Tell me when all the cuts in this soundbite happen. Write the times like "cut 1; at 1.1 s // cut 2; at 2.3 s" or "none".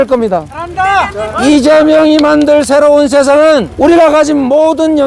cut 1; at 0.9 s // cut 2; at 3.7 s